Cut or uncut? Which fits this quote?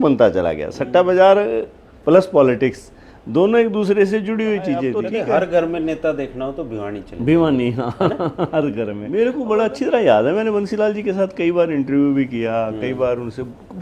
cut